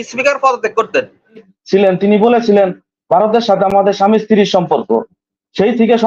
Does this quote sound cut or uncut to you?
cut